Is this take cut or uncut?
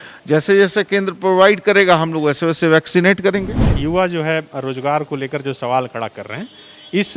cut